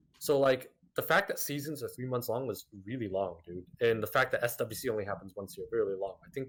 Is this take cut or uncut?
uncut